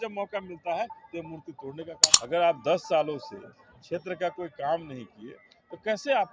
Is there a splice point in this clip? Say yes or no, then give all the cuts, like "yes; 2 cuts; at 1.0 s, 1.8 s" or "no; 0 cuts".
yes; 1 cut; at 2.1 s